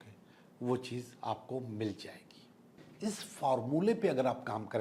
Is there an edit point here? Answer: yes; 1 cut; at 2.8 s

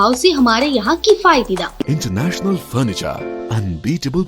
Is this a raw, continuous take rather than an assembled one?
no; 1 cut; at 1.8 s

